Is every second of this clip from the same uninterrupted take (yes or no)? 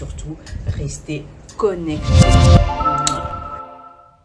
no